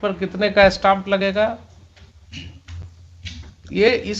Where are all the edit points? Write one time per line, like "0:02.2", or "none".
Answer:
none